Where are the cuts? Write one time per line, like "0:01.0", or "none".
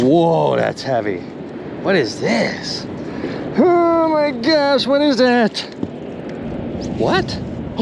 none